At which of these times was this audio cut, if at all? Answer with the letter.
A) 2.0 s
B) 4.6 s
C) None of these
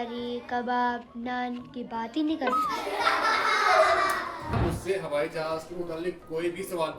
B